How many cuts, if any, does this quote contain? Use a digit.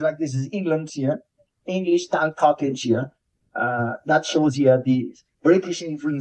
0